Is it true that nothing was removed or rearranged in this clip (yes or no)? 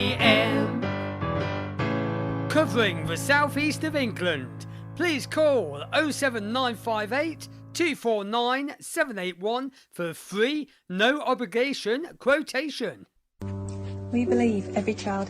no